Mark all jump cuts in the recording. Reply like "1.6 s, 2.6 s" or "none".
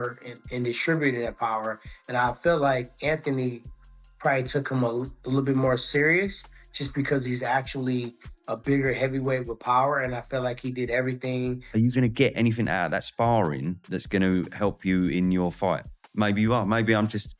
11.6 s